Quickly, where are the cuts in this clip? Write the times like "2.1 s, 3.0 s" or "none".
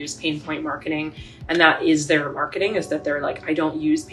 none